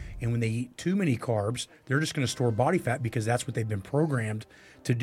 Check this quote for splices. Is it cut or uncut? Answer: uncut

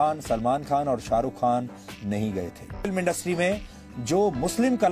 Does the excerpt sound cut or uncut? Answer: cut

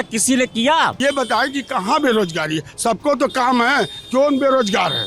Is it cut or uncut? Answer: cut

